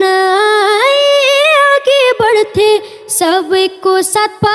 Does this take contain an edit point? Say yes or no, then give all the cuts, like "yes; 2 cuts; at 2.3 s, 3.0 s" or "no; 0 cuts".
no; 0 cuts